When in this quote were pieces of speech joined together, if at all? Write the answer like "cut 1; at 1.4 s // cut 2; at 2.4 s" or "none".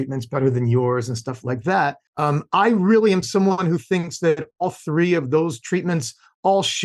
none